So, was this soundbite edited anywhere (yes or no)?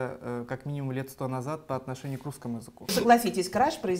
yes